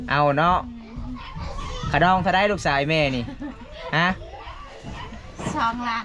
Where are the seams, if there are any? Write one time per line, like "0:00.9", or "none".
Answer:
none